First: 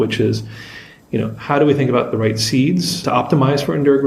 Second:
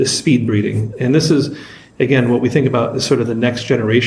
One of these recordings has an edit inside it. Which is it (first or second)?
first